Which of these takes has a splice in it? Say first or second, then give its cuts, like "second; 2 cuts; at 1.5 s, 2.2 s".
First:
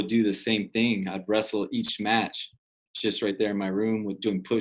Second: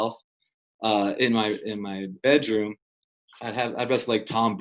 second; 1 cut; at 3.0 s